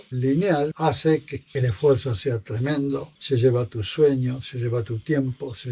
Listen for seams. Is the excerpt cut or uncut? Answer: uncut